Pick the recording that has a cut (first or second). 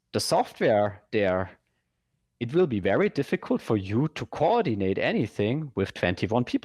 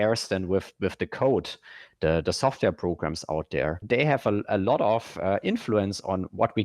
second